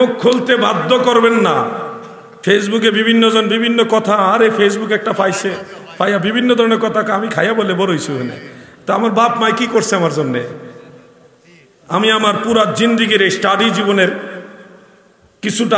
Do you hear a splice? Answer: no; 0 cuts

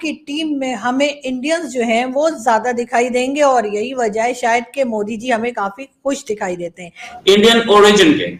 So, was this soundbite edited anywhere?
yes; 1 cut; at 7.1 s

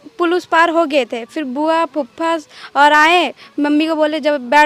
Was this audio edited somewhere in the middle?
no; 0 cuts

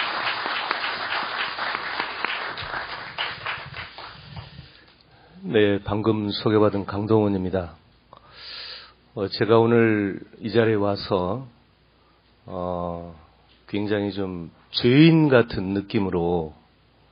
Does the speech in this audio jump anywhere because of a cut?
yes; 1 cut; at 14.1 s

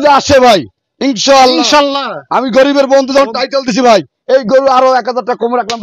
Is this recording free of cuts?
yes; 0 cuts

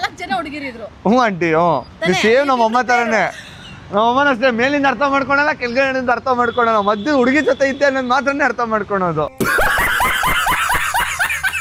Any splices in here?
no; 0 cuts

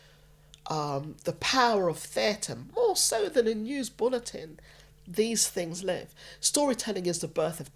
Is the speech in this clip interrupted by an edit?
no; 0 cuts

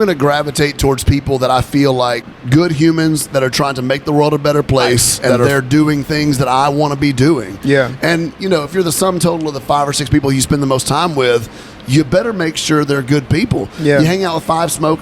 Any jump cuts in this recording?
yes; 2 cuts; at 2.2 s, 5.5 s

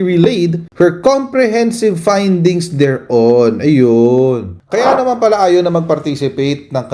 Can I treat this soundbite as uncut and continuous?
yes; 0 cuts

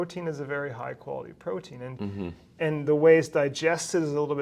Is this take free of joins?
yes; 0 cuts

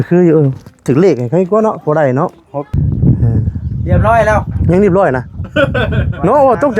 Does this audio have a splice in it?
yes; 1 cut; at 2.7 s

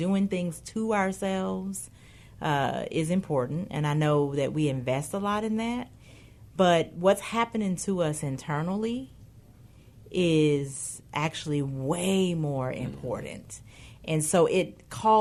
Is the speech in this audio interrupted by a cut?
no; 0 cuts

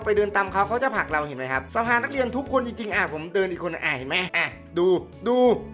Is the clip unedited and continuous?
no; 2 cuts; at 1.6 s, 4.3 s

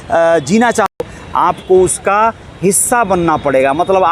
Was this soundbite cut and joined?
yes; 1 cut; at 1.0 s

